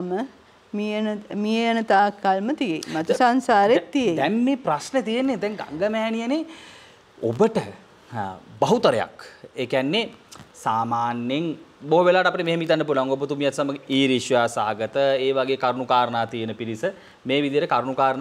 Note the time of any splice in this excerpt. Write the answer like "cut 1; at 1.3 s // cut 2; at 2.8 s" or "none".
none